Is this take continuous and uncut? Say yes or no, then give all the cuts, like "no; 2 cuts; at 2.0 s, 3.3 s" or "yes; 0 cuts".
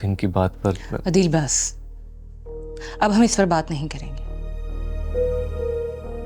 yes; 0 cuts